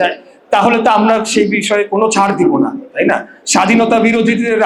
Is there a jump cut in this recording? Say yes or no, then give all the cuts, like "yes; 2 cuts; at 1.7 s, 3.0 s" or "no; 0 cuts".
no; 0 cuts